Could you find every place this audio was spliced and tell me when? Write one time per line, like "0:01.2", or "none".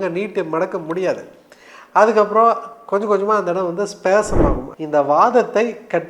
0:04.7